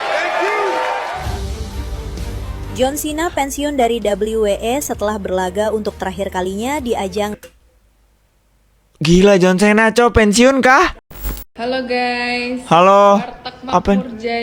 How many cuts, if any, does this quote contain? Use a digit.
1